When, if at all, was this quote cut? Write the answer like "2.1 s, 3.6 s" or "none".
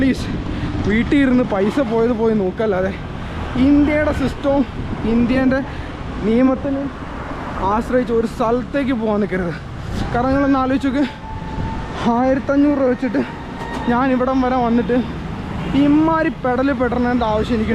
none